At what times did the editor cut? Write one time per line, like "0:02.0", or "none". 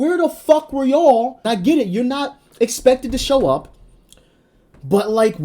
0:01.4